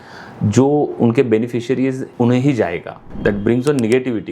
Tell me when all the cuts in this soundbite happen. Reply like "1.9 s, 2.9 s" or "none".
2.0 s, 3.1 s